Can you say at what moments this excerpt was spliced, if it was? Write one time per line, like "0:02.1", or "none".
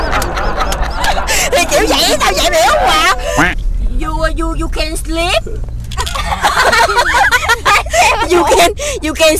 0:03.4